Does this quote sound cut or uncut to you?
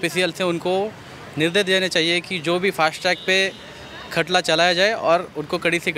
uncut